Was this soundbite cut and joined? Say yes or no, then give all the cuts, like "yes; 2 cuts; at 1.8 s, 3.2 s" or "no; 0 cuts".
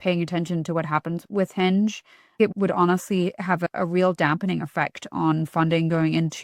yes; 3 cuts; at 1.2 s, 2.5 s, 3.6 s